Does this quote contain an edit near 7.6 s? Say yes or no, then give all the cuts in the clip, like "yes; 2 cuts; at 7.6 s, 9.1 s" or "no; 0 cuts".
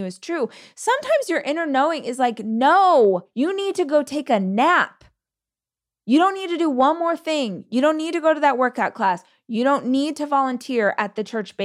no; 1 cut; at 3.3 s